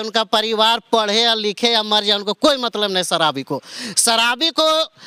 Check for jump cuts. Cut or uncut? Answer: uncut